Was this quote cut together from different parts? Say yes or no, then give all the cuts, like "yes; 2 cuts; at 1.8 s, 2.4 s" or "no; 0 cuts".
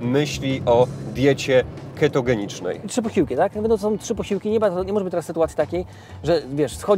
yes; 1 cut; at 2.9 s